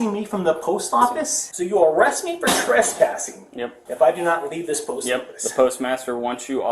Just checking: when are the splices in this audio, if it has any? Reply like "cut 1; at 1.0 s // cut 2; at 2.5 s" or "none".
cut 1; at 1.4 s